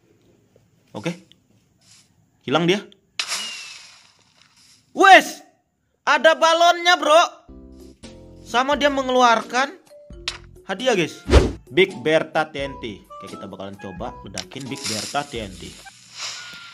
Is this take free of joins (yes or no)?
no